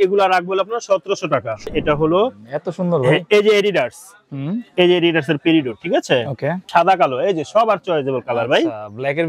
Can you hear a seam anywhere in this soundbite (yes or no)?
yes